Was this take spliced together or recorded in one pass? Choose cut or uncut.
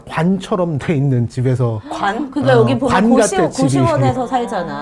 uncut